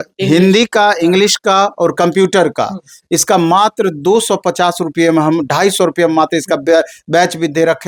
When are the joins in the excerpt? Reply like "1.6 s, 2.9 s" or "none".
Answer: none

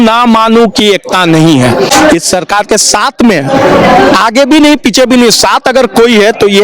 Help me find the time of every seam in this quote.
1.9 s

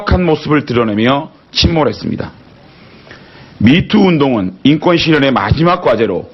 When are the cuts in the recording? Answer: 3.6 s

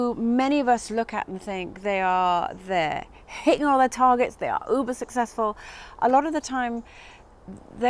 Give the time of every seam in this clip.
none

